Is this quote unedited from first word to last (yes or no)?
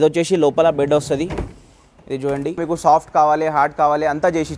no